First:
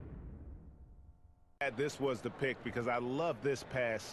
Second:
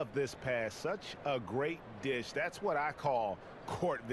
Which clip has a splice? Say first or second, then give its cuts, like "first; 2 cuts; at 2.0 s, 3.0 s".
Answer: first; 1 cut; at 1.6 s